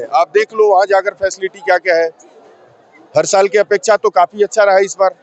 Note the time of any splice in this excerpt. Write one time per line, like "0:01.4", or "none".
none